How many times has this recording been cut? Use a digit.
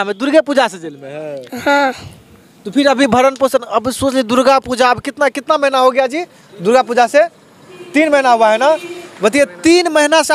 0